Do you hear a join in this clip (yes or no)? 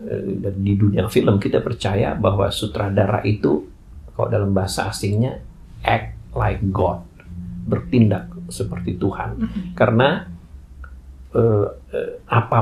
no